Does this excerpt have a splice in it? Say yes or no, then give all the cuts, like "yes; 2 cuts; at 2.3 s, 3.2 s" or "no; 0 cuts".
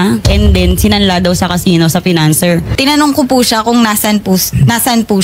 yes; 1 cut; at 2.7 s